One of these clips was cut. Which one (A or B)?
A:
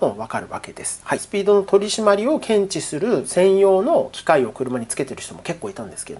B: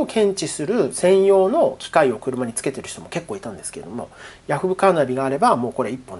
A